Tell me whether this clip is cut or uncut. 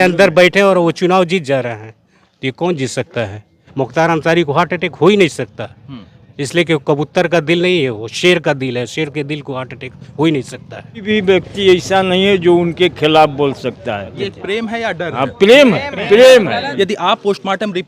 cut